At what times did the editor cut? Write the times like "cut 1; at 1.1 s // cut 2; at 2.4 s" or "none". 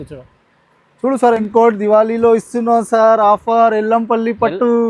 cut 1; at 1.4 s